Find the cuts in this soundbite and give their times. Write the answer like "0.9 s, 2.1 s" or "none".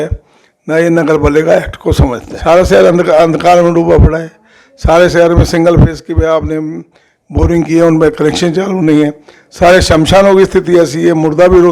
2.3 s